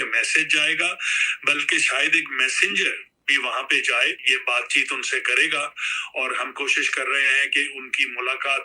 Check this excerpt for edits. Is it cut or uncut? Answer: cut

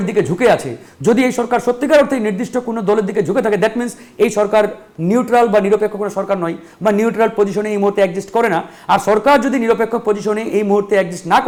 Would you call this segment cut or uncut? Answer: uncut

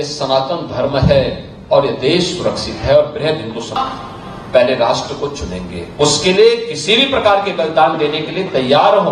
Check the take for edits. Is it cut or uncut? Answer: cut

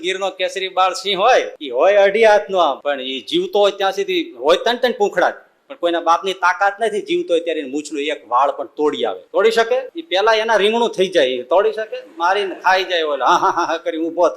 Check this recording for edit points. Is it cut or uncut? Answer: cut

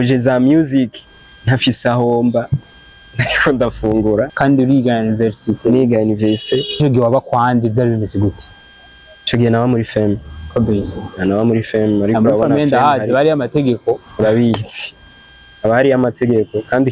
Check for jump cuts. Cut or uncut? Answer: cut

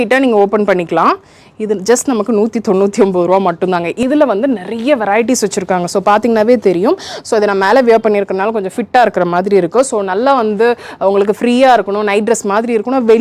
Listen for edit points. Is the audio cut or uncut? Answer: cut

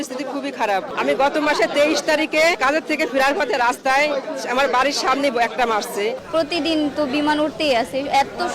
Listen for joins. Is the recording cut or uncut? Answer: cut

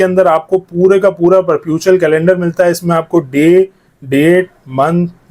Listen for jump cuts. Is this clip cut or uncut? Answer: uncut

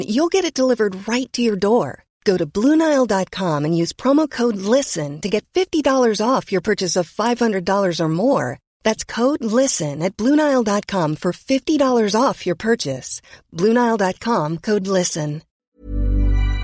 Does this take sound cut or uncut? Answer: cut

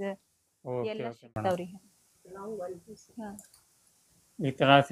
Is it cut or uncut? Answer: uncut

